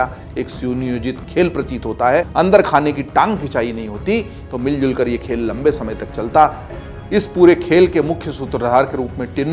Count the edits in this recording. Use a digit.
2